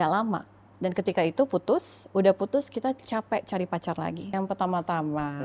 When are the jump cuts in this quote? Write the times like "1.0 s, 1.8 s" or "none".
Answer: 4.3 s